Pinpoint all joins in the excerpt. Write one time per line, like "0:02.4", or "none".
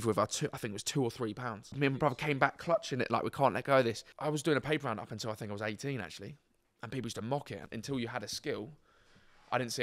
0:01.8
0:04.1
0:07.7